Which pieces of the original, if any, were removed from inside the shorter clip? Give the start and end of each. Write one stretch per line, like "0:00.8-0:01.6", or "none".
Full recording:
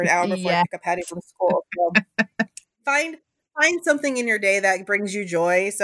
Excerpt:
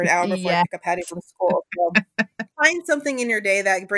0:02.4-0:03.4